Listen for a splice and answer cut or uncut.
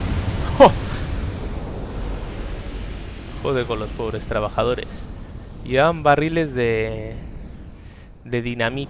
uncut